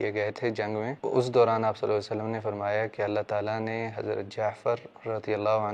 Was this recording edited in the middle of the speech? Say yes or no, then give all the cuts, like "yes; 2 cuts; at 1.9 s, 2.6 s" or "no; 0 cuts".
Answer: yes; 1 cut; at 0.9 s